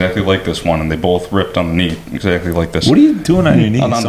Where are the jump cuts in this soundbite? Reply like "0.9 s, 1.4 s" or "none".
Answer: none